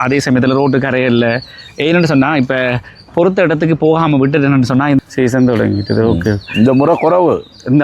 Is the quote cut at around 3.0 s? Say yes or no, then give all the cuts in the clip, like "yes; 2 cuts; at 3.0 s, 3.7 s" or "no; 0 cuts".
no; 1 cut; at 5.1 s